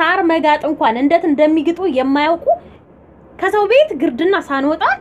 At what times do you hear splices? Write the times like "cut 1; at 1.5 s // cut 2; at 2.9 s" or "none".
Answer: cut 1; at 2.8 s